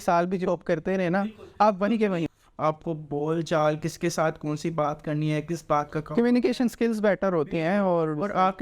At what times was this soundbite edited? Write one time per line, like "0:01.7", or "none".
0:02.3

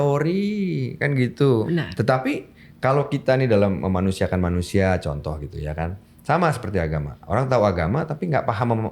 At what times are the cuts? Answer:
0:01.7

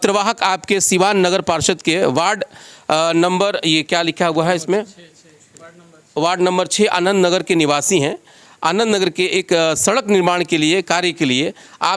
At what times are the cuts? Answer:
none

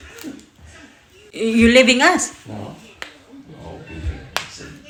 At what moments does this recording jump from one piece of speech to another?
none

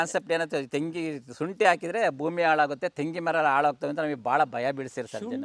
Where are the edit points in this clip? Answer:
none

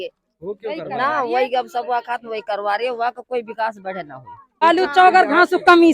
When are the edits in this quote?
0:04.6

